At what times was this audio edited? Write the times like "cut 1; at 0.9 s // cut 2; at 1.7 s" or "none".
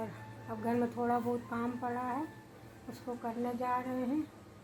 none